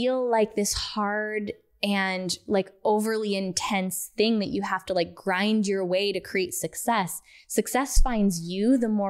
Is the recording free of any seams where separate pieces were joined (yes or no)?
yes